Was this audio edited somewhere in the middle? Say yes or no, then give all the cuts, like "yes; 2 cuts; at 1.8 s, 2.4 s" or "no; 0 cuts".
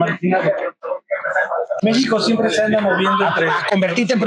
no; 0 cuts